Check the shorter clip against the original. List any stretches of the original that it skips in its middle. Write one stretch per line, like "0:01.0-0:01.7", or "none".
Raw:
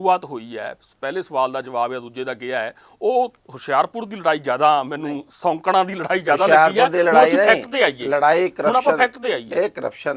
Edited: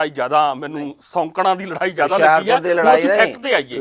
none